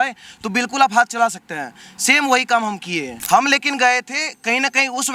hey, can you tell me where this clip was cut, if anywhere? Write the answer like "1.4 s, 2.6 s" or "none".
3.1 s